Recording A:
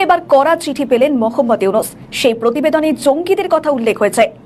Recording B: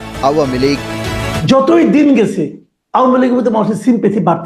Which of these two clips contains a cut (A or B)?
B